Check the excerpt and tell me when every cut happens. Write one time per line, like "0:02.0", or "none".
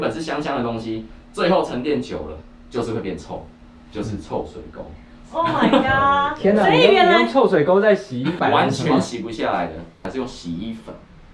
0:08.4